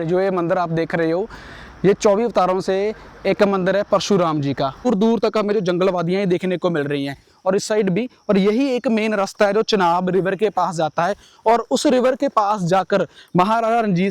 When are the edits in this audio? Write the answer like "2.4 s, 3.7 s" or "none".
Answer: 4.9 s